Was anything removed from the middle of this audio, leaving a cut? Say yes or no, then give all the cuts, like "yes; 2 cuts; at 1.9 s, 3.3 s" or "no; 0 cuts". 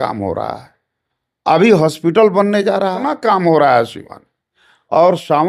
yes; 1 cut; at 3.1 s